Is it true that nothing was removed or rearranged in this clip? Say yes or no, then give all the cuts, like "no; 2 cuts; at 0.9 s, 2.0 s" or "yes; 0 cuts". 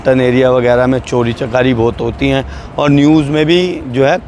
yes; 0 cuts